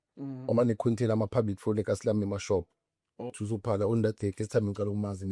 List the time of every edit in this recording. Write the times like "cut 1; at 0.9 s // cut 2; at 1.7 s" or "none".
cut 1; at 3.2 s